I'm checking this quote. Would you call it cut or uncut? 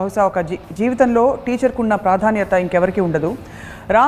uncut